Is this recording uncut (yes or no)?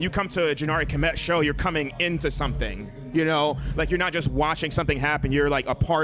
yes